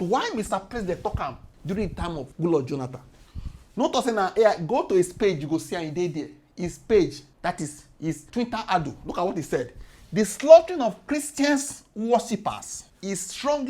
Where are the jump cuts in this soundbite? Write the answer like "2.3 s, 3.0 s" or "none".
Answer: none